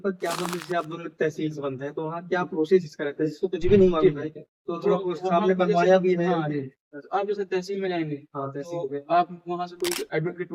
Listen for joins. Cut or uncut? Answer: uncut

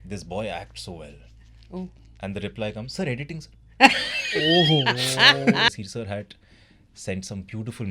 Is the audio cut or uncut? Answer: cut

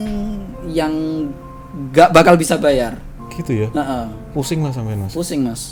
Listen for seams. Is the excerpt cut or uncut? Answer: uncut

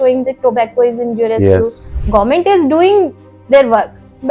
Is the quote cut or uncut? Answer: cut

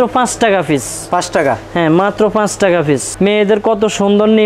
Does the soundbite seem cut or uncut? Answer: cut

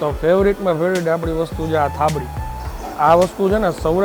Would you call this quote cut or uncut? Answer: uncut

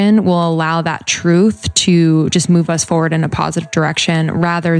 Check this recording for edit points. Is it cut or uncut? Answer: uncut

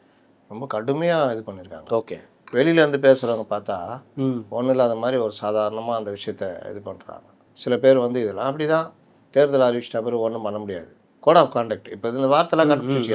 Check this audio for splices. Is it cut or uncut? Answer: uncut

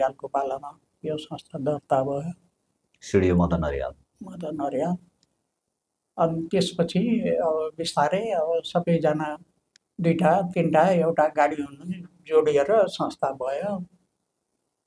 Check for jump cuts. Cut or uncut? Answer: uncut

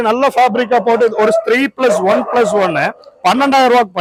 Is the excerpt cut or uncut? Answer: uncut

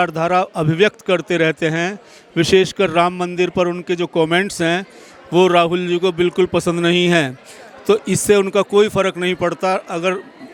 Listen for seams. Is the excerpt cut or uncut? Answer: uncut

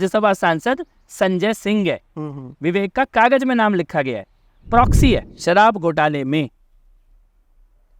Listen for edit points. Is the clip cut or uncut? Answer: cut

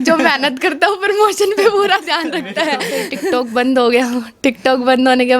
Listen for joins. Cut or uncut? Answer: cut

